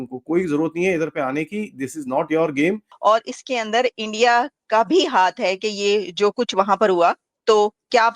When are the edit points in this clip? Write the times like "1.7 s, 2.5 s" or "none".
2.9 s